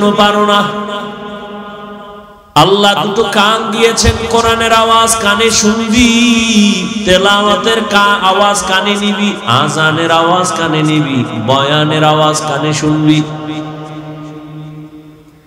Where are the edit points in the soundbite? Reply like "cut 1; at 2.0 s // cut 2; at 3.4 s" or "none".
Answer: cut 1; at 2.3 s